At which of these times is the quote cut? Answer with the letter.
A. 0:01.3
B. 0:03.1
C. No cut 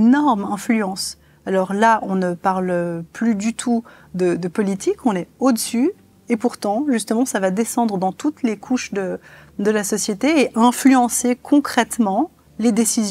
C